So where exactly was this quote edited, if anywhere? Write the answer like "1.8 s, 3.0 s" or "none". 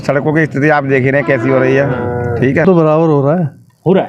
2.6 s

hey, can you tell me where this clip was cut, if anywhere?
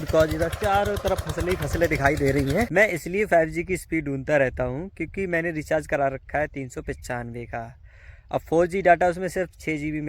2.7 s

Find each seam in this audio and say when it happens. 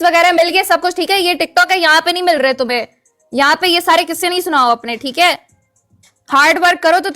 none

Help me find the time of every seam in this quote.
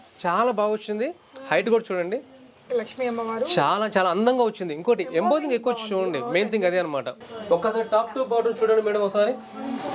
7.2 s

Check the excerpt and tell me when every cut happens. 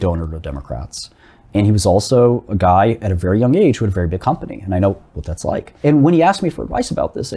5.7 s

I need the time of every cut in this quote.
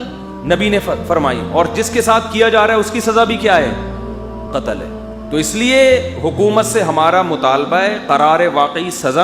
5.2 s

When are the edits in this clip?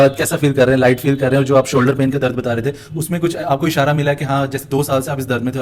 none

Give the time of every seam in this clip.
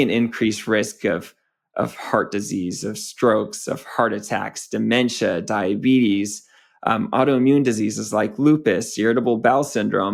none

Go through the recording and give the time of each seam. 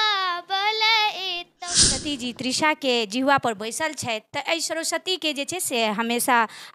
2.0 s

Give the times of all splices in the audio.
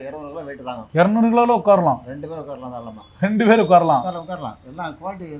none

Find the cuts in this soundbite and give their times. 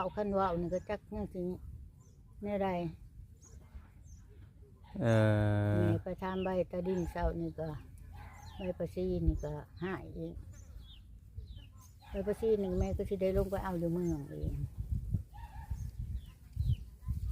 none

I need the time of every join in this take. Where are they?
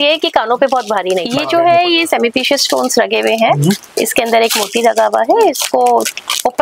1.3 s

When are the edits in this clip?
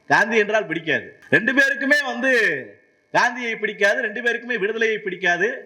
1.1 s

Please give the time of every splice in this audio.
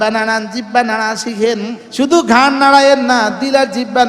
1.8 s

